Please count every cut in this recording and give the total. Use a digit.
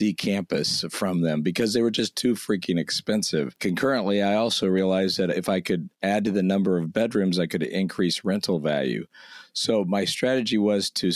1